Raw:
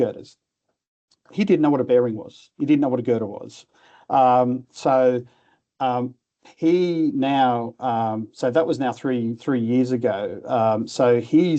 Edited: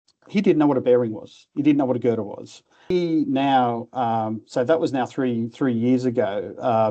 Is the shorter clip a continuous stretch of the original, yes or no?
no